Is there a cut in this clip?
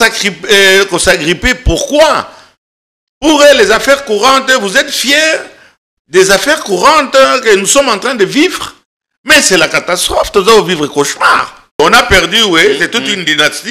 yes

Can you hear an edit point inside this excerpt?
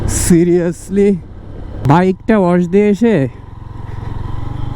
yes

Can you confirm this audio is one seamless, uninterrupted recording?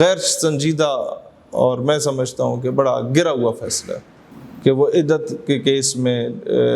yes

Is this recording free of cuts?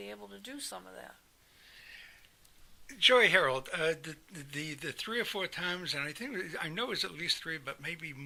yes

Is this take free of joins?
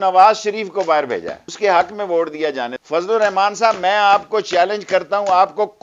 no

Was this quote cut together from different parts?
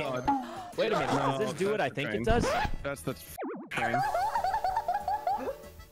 no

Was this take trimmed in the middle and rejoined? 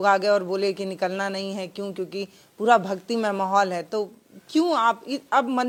no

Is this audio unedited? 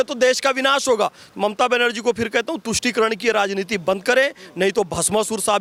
yes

